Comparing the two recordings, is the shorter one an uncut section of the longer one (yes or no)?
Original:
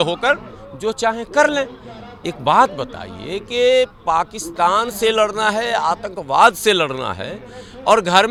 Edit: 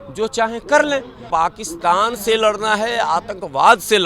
no